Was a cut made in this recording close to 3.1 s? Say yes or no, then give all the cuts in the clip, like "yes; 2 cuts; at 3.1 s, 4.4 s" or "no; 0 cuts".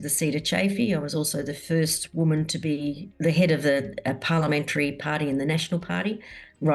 yes; 1 cut; at 3.1 s